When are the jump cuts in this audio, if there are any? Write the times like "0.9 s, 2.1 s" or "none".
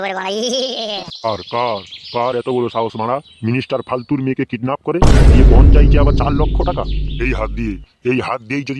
1.1 s